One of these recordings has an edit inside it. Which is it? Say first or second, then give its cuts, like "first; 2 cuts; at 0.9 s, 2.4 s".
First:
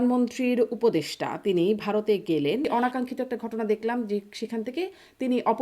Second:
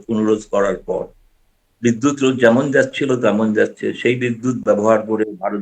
first; 1 cut; at 2.6 s